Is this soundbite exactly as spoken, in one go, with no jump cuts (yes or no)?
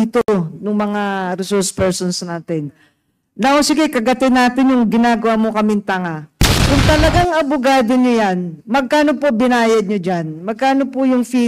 yes